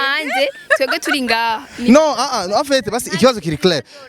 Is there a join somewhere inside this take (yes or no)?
no